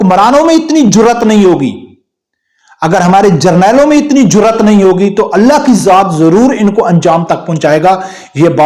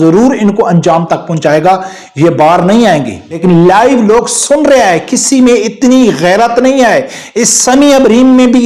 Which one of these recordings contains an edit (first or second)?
second